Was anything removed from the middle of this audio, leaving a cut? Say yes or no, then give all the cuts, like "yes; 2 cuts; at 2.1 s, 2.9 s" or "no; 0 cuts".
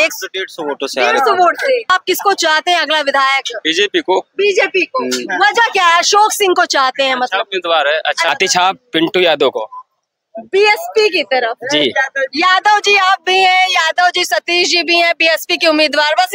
yes; 2 cuts; at 1.9 s, 8.3 s